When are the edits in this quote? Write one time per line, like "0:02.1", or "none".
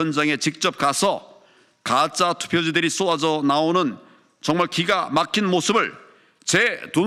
none